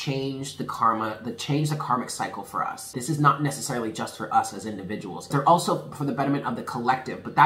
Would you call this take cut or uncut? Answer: cut